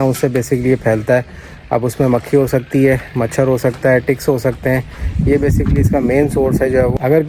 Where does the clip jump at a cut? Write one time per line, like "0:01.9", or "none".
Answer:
none